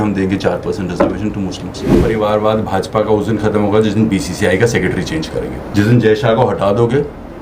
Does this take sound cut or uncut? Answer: cut